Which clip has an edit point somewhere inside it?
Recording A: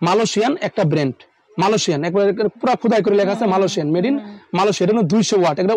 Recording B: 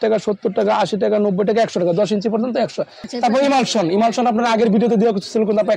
B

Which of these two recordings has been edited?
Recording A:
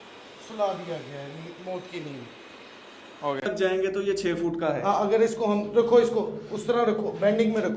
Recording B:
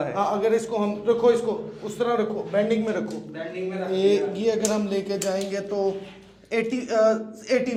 A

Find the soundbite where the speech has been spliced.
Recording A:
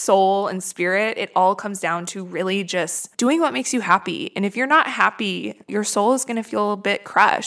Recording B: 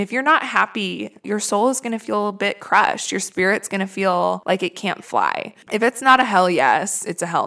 B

